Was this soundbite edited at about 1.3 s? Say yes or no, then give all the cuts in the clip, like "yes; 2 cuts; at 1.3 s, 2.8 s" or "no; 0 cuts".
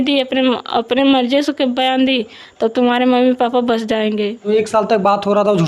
no; 1 cut; at 4.4 s